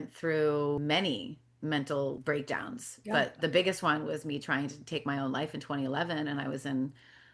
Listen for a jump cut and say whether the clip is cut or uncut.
cut